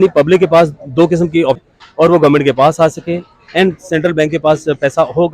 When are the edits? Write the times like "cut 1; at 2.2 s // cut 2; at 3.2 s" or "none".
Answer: cut 1; at 1.6 s